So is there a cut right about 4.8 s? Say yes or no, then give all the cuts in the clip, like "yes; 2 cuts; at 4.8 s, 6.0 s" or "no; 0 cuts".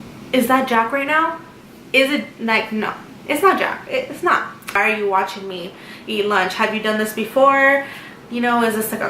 yes; 1 cut; at 4.8 s